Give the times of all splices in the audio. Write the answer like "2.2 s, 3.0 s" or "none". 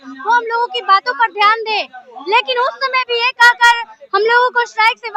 none